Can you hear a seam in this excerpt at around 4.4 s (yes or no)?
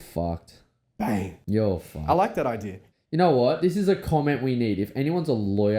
no